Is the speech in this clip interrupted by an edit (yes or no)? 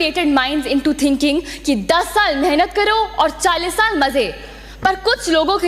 no